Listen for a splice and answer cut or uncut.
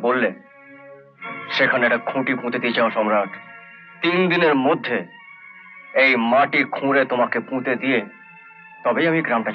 uncut